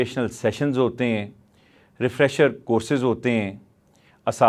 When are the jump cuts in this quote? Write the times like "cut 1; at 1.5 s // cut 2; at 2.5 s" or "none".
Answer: none

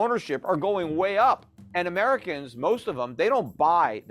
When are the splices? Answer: cut 1; at 1.6 s

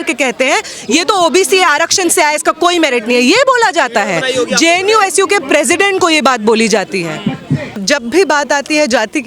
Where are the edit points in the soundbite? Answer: cut 1; at 7.8 s

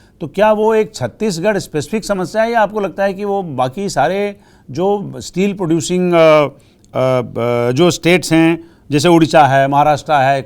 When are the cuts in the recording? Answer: none

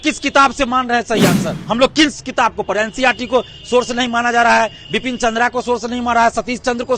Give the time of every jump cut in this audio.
cut 1; at 1.5 s

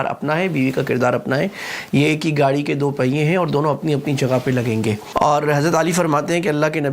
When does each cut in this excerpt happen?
cut 1; at 5.0 s

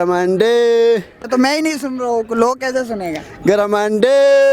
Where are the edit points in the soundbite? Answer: cut 1; at 1.2 s

